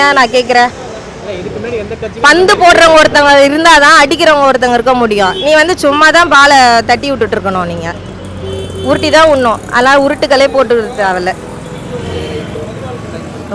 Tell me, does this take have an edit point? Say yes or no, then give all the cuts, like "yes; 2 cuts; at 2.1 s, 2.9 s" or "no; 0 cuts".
no; 0 cuts